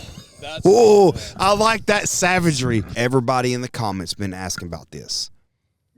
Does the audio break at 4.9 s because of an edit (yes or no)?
no